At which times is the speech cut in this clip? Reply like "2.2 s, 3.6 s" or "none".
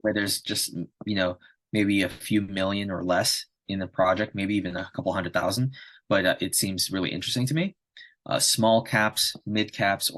none